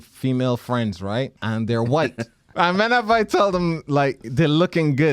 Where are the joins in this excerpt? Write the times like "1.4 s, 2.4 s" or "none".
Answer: 1.4 s, 2.4 s